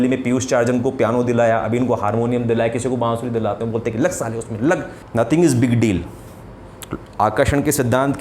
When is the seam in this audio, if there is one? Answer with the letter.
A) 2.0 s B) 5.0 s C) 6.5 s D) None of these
B